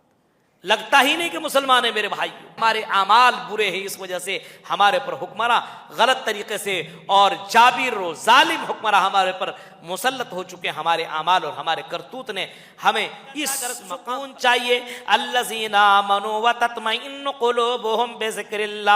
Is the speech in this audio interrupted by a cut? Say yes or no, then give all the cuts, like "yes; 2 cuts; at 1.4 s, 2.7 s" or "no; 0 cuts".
yes; 2 cuts; at 2.6 s, 13.9 s